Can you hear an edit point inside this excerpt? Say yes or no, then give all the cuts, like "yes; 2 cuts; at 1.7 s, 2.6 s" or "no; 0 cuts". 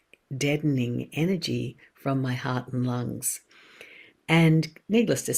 no; 0 cuts